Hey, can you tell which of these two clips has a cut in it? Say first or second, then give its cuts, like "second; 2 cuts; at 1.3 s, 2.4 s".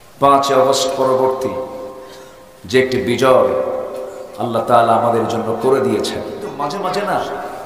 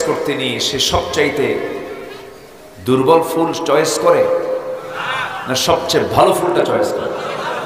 first; 1 cut; at 6.4 s